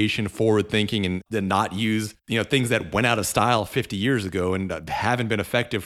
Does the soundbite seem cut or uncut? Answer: cut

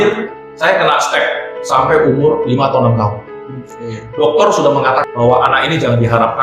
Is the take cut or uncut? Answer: cut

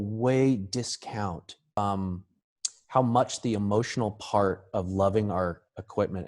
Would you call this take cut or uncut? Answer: cut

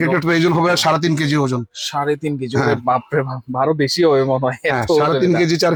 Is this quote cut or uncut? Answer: uncut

